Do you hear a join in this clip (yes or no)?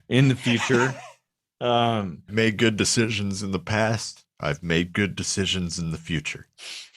yes